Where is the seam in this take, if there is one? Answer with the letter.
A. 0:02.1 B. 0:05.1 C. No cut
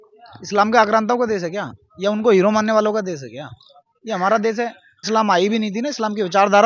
B